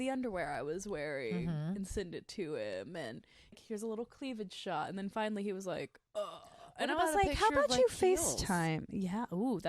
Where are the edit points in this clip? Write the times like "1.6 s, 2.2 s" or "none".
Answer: 3.5 s